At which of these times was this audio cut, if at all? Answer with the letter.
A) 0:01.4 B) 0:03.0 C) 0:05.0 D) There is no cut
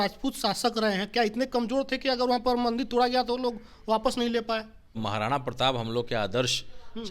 C